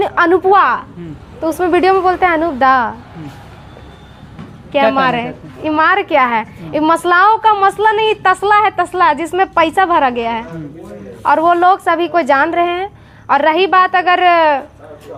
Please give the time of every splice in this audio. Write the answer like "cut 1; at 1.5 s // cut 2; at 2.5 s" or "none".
none

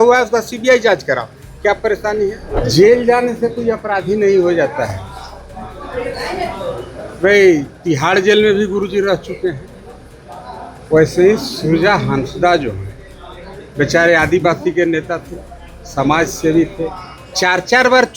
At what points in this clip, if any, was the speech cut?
cut 1; at 2.5 s

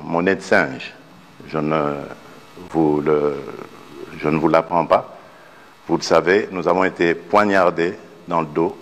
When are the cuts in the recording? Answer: none

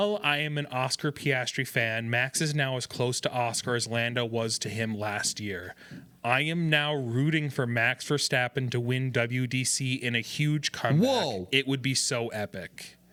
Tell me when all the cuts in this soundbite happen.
none

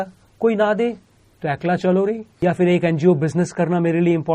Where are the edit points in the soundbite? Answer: cut 1; at 2.3 s

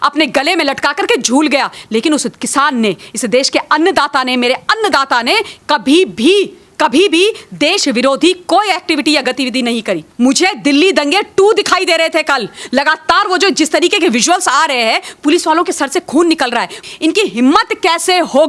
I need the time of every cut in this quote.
cut 1; at 10.1 s // cut 2; at 16.8 s

